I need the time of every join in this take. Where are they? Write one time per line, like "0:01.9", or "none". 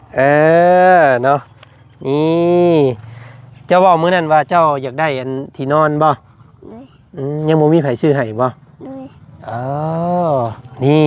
none

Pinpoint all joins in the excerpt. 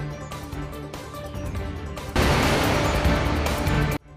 0:01.6

